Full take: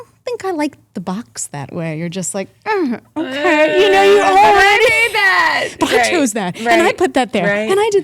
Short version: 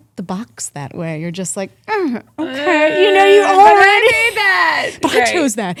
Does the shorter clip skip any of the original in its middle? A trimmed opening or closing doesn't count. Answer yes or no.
no